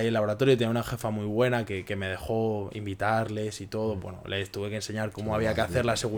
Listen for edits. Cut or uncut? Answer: uncut